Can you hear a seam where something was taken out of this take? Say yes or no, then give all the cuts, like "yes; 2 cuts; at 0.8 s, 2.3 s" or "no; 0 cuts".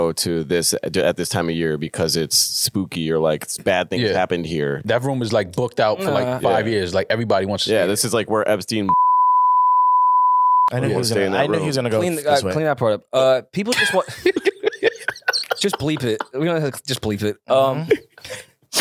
yes; 1 cut; at 4.8 s